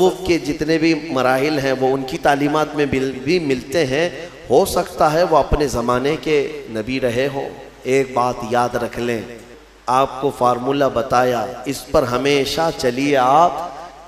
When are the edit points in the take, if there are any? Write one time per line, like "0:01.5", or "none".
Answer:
0:09.5